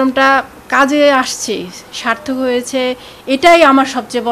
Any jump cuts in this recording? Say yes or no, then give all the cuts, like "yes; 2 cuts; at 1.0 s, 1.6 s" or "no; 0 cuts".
no; 0 cuts